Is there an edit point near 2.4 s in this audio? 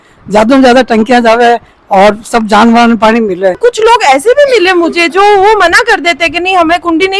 no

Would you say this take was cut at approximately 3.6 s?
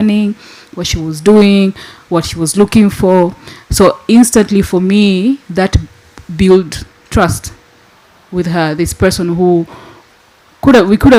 no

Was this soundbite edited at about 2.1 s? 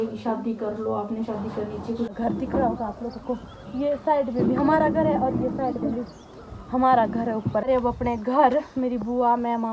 yes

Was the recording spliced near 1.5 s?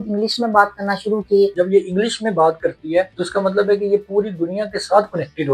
yes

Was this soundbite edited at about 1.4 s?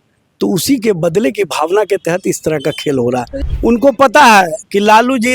no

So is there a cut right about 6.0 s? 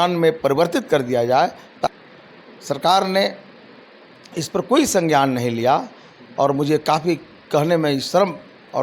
no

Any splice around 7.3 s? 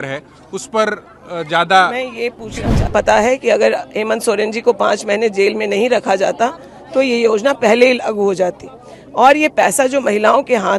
no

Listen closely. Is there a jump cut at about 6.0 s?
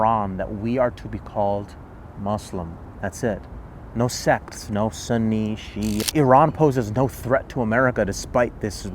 yes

